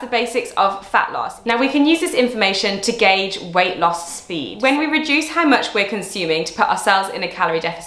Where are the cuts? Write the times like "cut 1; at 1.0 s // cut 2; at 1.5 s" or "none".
cut 1; at 1.3 s // cut 2; at 4.5 s